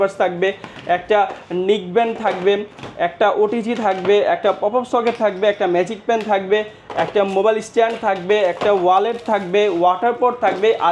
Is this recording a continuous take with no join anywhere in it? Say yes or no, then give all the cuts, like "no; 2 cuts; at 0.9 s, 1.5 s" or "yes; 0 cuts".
yes; 0 cuts